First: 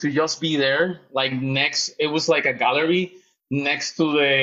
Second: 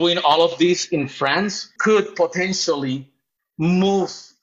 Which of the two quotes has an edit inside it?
second; 1 cut; at 1.7 s

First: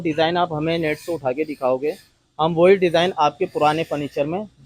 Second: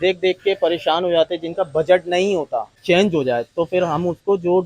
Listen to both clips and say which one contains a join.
second; 1 cut; at 2.8 s

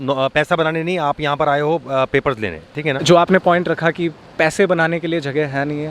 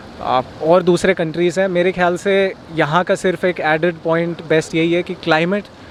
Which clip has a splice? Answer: first; 1 cut; at 3.0 s

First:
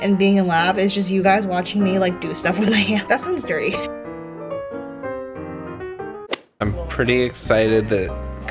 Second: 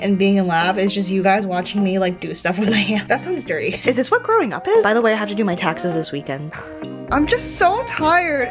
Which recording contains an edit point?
second; 2 cuts; at 3.8 s, 6.8 s

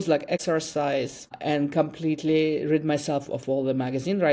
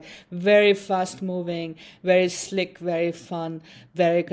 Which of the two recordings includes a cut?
first; 1 cut; at 1.2 s

